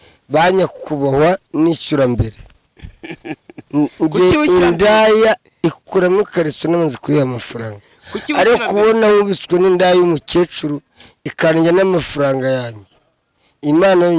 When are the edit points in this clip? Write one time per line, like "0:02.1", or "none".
none